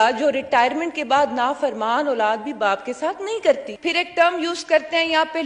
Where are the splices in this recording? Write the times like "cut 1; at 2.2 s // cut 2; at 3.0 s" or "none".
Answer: cut 1; at 3.7 s